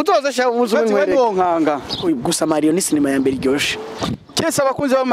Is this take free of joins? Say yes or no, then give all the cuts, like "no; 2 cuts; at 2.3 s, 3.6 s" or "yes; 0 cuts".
no; 1 cut; at 2.0 s